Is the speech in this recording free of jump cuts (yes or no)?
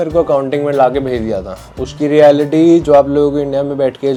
yes